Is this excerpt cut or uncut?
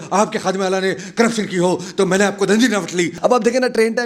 cut